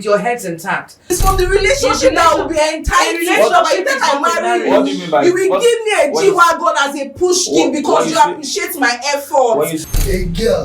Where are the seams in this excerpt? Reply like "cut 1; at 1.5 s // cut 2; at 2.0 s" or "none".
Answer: cut 1; at 1.1 s // cut 2; at 9.8 s